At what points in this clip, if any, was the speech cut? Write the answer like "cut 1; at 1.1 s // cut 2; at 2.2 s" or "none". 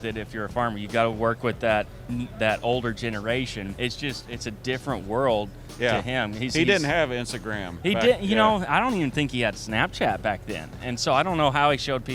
cut 1; at 3.7 s